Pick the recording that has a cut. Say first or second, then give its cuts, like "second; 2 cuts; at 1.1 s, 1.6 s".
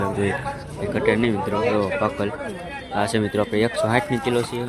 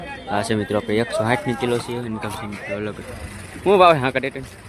second; 1 cut; at 3.0 s